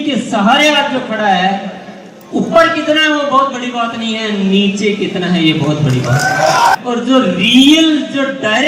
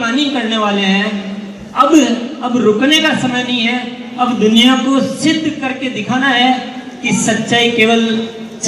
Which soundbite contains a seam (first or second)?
first